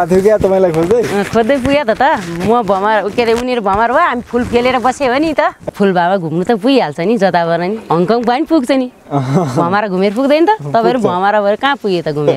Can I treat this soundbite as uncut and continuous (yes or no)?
no